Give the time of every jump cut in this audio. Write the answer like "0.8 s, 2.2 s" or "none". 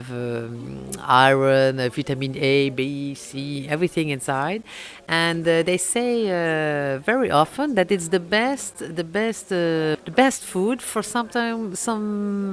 10.0 s

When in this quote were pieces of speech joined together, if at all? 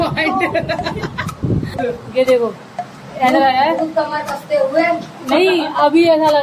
1.7 s

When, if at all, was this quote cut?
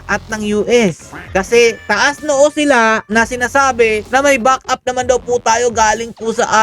1.1 s, 3.0 s, 4.0 s

